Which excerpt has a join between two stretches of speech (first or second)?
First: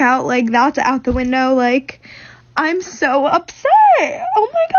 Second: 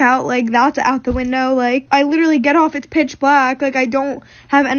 second